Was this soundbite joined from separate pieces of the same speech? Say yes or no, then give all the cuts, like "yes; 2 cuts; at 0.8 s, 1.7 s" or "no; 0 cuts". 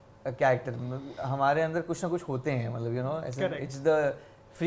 no; 0 cuts